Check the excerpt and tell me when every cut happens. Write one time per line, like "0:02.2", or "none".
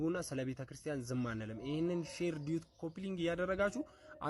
none